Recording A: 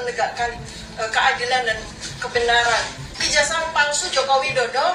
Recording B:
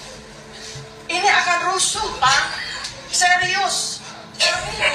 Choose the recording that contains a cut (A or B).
A